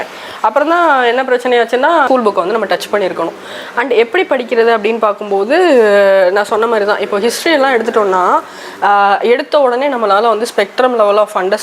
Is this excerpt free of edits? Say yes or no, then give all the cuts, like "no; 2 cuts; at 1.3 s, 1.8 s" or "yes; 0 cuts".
no; 1 cut; at 2.1 s